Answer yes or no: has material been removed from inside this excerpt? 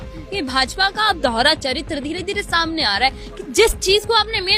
no